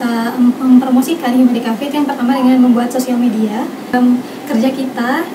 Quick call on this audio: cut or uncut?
cut